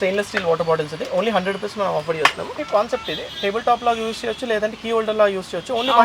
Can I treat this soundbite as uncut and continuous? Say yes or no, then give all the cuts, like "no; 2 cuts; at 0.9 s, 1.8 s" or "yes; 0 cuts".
no; 1 cut; at 2.6 s